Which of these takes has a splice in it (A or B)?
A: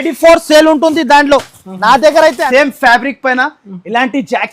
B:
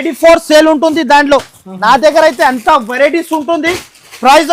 A